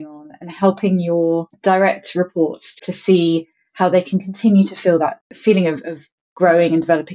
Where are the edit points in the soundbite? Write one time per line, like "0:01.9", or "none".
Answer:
0:01.5
0:02.7
0:05.3